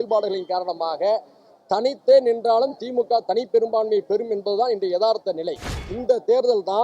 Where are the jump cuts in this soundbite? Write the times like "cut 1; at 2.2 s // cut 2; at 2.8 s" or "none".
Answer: cut 1; at 5.8 s